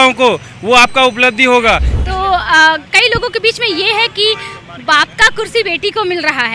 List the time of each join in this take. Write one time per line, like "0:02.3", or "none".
0:02.0